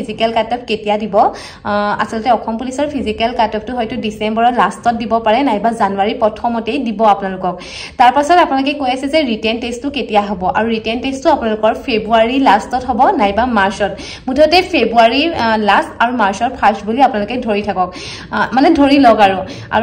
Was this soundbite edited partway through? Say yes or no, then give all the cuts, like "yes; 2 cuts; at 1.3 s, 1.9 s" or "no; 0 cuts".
no; 0 cuts